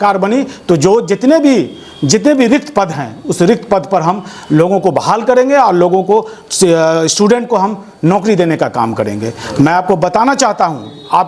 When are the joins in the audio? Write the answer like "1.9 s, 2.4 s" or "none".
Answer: none